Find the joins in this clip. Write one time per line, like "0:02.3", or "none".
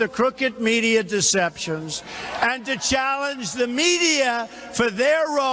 none